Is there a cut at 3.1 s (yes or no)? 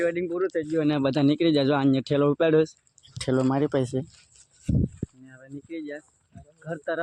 no